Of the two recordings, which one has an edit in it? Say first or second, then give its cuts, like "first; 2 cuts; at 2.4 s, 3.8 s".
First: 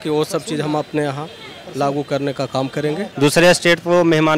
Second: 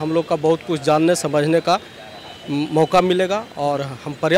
first; 1 cut; at 3.1 s